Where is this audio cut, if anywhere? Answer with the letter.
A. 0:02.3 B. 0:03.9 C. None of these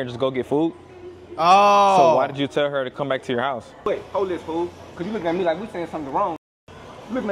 B